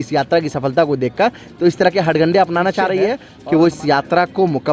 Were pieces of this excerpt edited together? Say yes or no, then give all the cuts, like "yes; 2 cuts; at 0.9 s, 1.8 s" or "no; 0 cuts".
yes; 1 cut; at 3.3 s